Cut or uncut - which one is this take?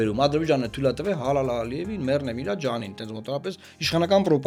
uncut